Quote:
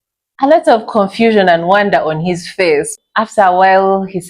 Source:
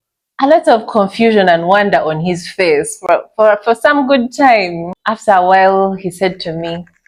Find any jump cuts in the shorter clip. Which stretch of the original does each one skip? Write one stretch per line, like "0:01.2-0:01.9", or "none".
0:02.9-0:04.8